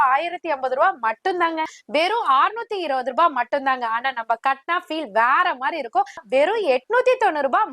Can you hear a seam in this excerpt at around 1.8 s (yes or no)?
yes